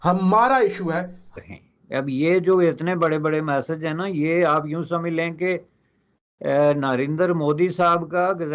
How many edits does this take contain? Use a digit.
1